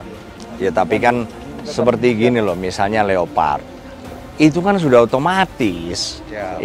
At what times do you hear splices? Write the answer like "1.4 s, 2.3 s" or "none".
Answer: none